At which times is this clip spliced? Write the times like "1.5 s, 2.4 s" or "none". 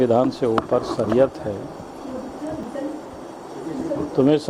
none